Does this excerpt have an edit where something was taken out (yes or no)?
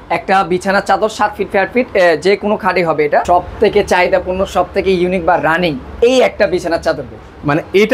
yes